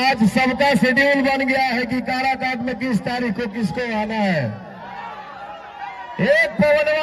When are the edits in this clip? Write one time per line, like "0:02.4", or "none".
none